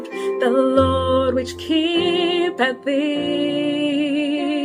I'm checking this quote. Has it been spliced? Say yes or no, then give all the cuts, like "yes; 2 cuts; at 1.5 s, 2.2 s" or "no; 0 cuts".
no; 0 cuts